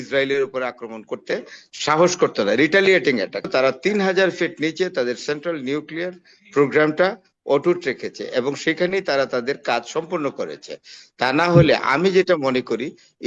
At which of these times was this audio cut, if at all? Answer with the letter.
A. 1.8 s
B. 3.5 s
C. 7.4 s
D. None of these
B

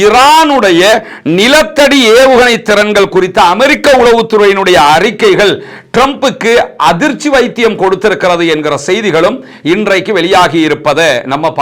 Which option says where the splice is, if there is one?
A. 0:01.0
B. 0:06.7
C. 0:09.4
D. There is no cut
D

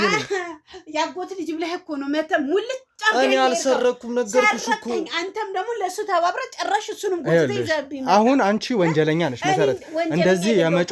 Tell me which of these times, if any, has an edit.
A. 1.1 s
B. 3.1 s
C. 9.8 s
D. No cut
D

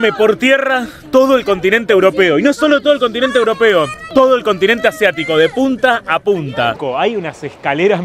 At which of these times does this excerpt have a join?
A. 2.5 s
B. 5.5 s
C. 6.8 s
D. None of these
C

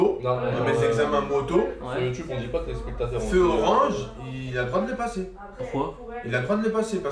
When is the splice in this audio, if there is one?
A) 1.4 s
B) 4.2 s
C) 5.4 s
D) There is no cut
D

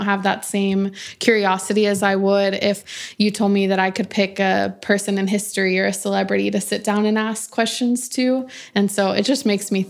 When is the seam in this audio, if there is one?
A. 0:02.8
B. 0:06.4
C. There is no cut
A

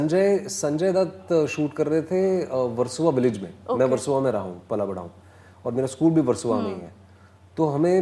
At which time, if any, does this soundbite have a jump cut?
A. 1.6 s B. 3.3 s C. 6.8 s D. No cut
D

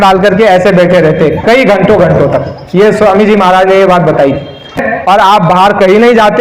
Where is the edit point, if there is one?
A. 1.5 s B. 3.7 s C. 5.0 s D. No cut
C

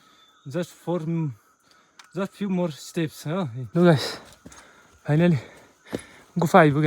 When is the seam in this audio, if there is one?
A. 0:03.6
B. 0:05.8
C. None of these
A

